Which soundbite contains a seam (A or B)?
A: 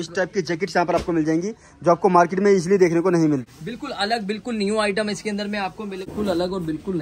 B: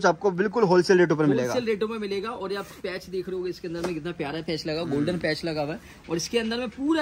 A